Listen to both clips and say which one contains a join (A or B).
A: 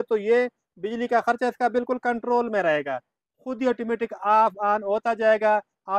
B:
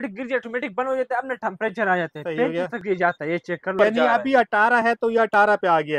B